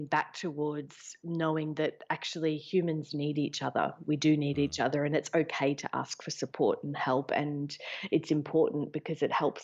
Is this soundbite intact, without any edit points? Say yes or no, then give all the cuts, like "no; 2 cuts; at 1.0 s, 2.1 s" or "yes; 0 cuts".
yes; 0 cuts